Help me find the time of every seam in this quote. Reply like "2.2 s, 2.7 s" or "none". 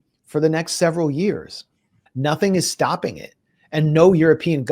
2.0 s